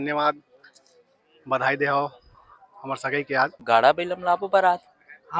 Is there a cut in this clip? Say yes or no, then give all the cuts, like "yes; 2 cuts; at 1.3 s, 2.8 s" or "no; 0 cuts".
yes; 1 cut; at 3.6 s